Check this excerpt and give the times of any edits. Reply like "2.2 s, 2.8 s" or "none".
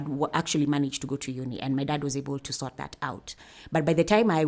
none